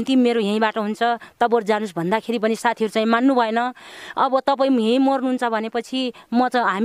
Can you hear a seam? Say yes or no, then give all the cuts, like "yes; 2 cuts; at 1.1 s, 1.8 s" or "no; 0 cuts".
no; 0 cuts